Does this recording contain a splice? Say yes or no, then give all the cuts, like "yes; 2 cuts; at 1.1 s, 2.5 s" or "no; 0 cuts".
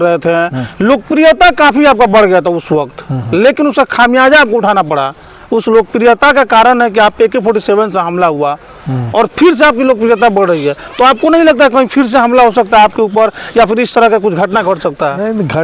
no; 0 cuts